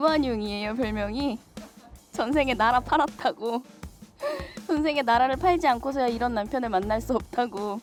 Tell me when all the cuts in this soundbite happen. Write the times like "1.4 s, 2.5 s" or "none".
none